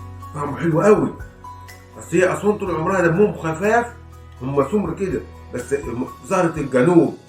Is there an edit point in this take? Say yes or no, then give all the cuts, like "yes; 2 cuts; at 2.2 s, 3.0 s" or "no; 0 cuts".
no; 0 cuts